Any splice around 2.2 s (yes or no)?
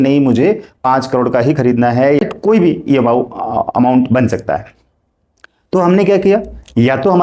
yes